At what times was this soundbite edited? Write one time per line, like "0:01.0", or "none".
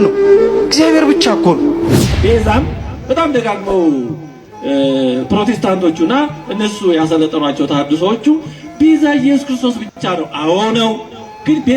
0:02.0